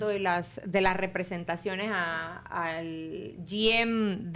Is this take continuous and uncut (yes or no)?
yes